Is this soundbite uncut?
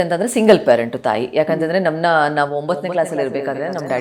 yes; 0 cuts

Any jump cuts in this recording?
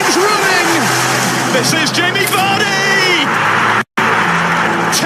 yes; 1 cut; at 3.5 s

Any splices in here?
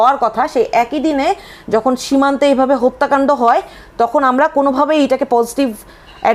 no; 0 cuts

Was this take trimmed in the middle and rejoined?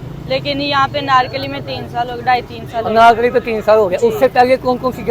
no; 0 cuts

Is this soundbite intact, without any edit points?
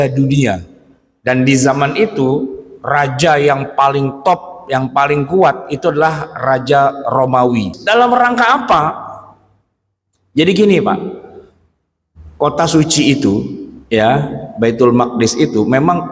no; 1 cut; at 7.8 s

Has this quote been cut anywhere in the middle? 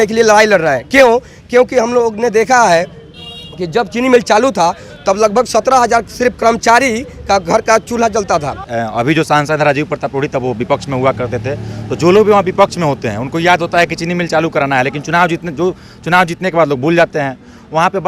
yes; 1 cut; at 8.7 s

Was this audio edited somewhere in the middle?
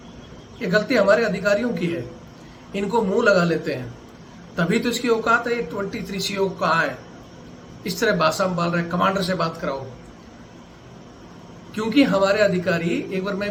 no; 0 cuts

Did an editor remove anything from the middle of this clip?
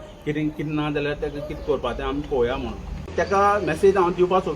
yes; 1 cut; at 3.1 s

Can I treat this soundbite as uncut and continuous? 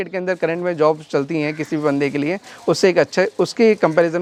yes; 0 cuts

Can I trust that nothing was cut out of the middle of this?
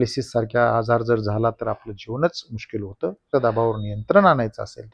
no; 1 cut; at 3.3 s

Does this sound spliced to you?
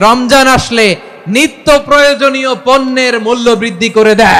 no; 0 cuts

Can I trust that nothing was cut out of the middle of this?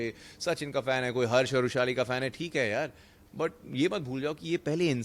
yes; 0 cuts

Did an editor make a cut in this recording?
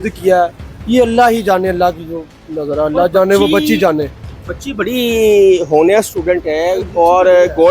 no; 0 cuts

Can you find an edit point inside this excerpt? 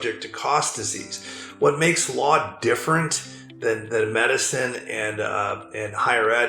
no; 0 cuts

